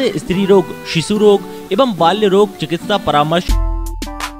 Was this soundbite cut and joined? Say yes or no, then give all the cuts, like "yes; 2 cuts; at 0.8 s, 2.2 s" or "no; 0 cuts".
yes; 1 cut; at 3.5 s